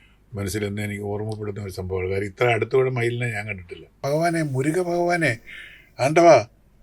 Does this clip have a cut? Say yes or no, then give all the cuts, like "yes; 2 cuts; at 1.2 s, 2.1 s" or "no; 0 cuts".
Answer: yes; 1 cut; at 4.0 s